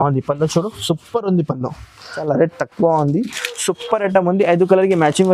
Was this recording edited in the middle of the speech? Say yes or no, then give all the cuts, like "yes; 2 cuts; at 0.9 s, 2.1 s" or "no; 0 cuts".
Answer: yes; 1 cut; at 2.1 s